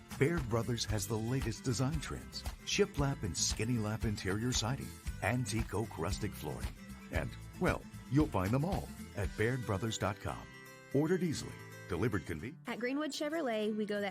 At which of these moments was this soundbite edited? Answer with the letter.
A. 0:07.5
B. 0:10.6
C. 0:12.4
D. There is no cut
C